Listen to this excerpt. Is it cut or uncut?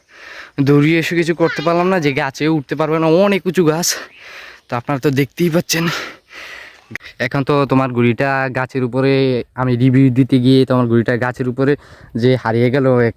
uncut